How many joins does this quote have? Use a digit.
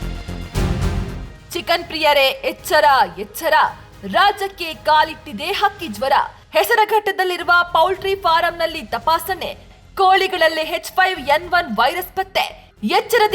1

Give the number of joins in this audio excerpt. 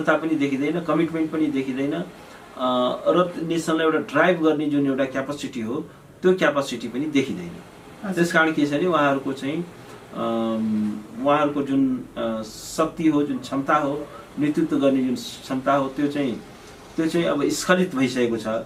0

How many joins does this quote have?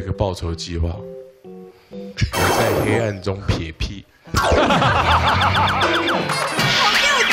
0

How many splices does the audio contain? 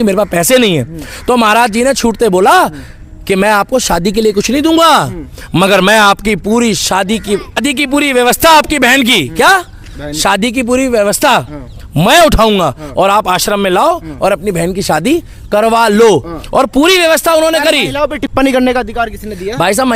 0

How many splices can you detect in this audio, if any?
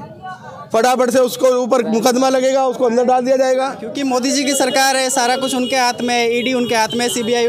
1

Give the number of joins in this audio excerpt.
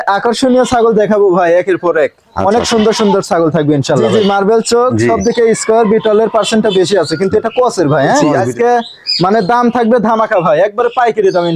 2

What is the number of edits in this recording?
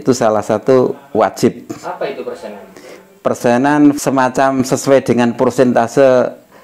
1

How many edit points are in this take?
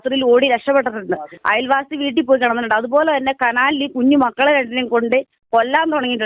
0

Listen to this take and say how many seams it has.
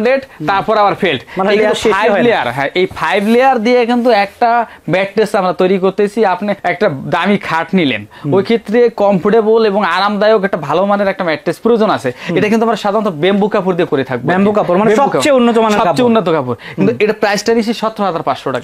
0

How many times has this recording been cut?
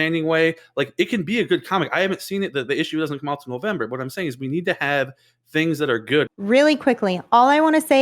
1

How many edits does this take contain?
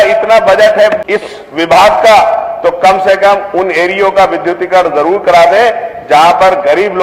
1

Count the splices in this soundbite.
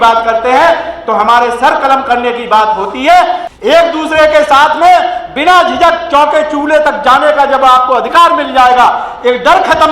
1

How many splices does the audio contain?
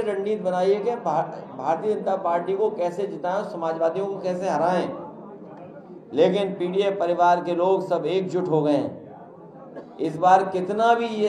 0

